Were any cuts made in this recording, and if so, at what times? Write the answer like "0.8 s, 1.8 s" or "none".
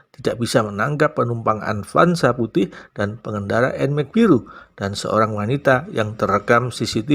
none